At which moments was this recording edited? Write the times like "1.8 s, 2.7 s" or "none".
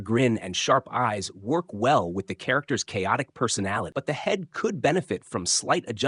3.9 s